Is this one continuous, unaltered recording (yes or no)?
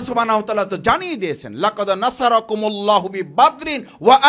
yes